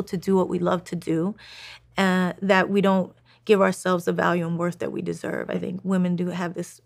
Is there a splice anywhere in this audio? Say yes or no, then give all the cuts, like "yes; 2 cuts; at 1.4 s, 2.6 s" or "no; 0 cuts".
no; 0 cuts